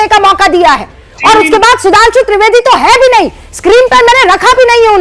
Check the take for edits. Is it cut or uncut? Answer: uncut